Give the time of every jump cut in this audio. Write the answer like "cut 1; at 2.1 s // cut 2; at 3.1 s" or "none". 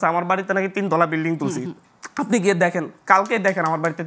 none